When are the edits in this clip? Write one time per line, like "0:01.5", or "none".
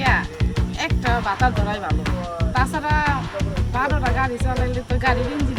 none